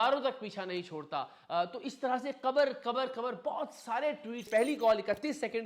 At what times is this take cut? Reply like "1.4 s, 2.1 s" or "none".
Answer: 4.5 s